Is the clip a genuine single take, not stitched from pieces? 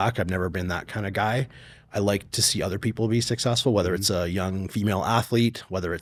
yes; 0 cuts

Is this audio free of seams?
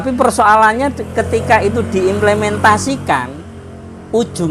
yes; 0 cuts

